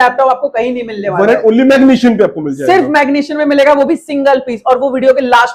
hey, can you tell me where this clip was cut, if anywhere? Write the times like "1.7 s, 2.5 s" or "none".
none